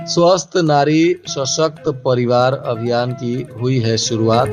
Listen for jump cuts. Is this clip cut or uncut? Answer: uncut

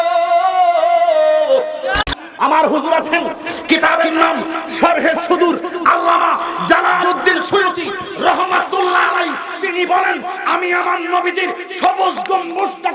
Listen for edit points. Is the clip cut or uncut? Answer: cut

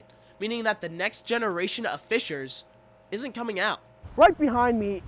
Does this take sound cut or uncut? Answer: cut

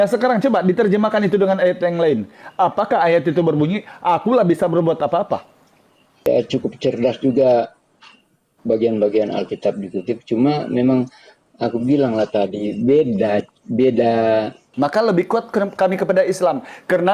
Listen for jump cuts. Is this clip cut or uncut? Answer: cut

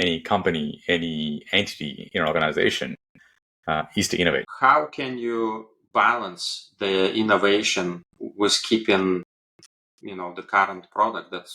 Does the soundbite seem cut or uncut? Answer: cut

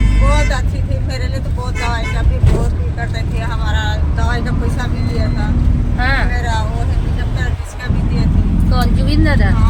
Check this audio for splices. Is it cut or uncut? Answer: uncut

